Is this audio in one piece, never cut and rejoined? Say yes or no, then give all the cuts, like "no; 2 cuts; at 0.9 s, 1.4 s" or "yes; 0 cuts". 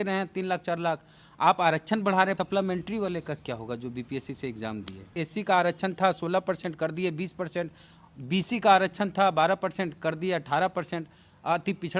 no; 2 cuts; at 2.3 s, 5.2 s